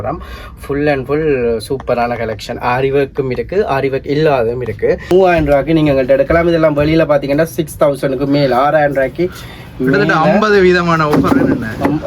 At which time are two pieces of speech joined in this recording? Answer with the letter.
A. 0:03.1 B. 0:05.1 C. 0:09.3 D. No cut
B